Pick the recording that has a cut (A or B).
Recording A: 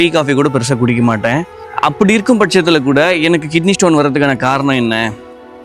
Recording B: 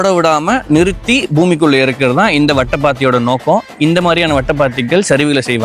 A